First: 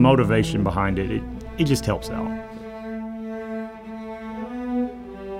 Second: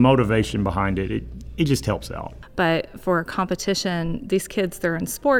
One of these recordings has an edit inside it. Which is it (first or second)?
second